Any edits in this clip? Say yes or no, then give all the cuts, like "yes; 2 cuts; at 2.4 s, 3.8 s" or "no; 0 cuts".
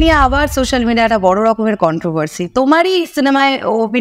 no; 0 cuts